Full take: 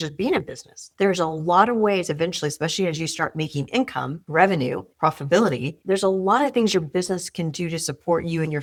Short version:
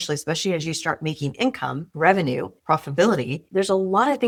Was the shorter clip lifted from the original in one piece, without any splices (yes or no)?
yes